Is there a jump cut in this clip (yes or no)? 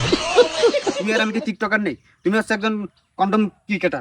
yes